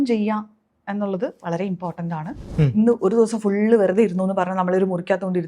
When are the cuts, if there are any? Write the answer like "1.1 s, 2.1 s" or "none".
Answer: 2.5 s